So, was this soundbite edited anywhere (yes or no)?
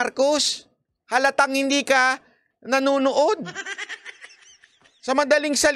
no